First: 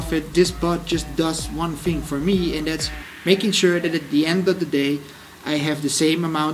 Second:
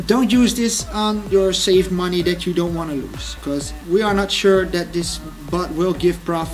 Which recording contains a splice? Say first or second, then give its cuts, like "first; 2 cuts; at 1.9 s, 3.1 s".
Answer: second; 1 cut; at 1.3 s